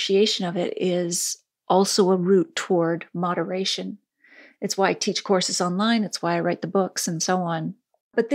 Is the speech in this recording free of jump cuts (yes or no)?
yes